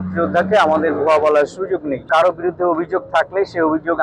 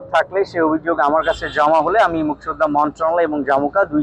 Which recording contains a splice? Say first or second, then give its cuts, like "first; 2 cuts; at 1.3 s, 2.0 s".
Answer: first; 1 cut; at 2.1 s